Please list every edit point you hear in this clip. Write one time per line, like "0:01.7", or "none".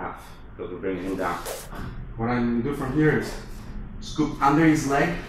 0:01.6